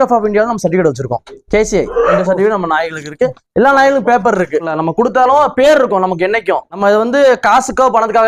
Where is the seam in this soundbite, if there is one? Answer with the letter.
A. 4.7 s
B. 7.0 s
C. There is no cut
A